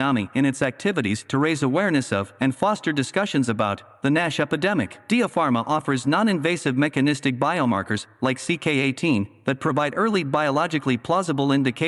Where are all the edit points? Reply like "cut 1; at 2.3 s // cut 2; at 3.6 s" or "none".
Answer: cut 1; at 2.3 s